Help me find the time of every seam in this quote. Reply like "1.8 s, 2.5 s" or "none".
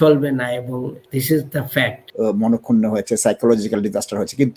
1.0 s, 2.0 s